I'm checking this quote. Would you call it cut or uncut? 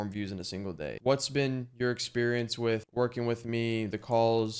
cut